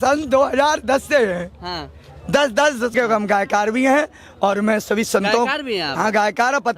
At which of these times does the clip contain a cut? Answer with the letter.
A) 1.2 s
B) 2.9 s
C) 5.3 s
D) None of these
B